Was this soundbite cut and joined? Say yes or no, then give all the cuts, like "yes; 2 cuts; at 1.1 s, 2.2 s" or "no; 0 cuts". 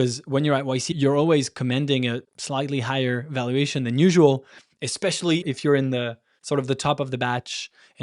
yes; 2 cuts; at 0.9 s, 5.4 s